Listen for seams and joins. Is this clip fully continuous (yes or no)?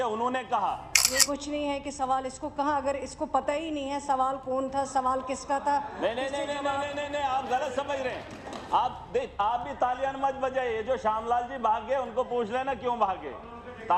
no